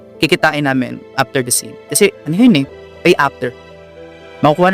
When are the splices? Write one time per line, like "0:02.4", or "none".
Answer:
0:02.7

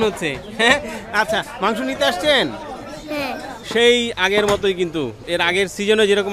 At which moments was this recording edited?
0:03.6
0:05.2

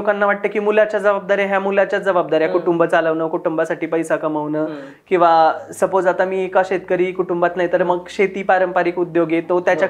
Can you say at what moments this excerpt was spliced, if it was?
none

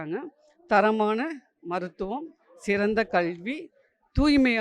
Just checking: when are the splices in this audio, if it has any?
none

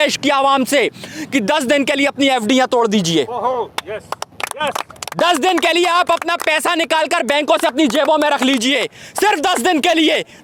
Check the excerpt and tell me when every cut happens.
none

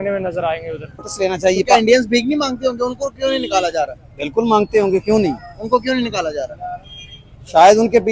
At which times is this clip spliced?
0:01.1

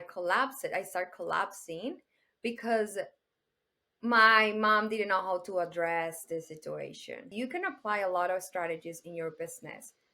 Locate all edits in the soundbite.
0:07.3

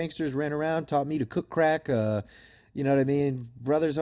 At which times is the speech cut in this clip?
none

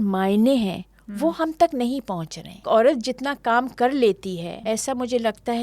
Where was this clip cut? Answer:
0:02.6
0:04.5

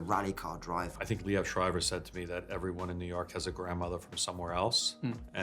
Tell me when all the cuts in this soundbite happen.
0:00.9

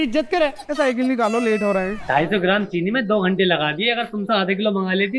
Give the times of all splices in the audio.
0:02.0

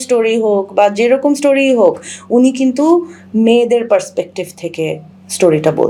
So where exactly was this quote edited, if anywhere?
none

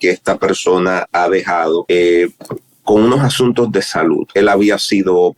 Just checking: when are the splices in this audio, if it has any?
0:01.8
0:04.3

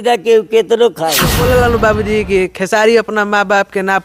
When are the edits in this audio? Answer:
0:01.4

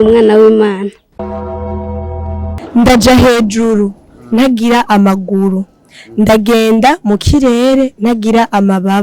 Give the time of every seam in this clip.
0:02.6

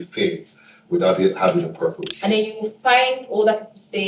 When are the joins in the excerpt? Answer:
0:02.1

